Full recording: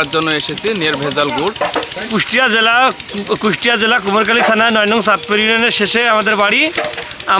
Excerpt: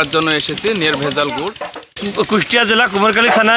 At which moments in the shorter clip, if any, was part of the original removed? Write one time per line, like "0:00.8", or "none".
0:01.9